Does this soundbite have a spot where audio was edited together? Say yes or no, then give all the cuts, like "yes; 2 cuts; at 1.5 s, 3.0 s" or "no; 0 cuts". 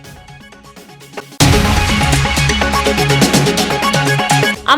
yes; 1 cut; at 1.3 s